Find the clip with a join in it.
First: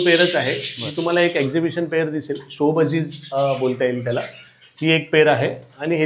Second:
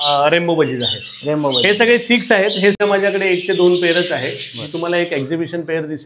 second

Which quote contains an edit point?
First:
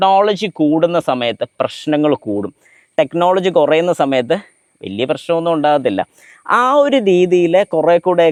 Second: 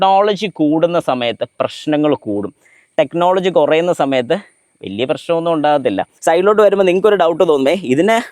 second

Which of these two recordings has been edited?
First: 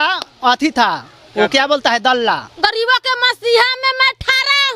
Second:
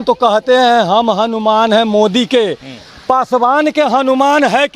first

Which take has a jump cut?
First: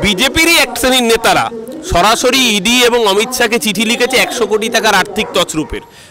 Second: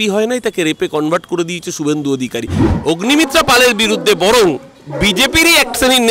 second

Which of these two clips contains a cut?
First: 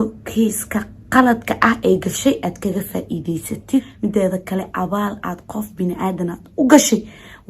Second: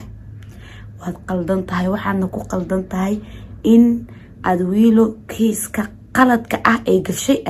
first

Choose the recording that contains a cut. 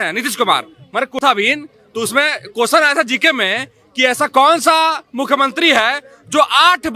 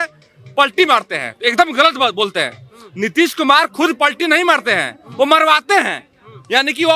first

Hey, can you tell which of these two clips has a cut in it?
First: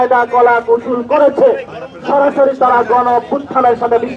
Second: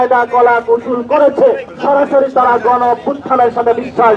second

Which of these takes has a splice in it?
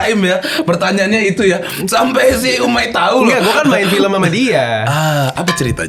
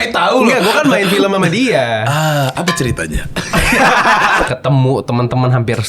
second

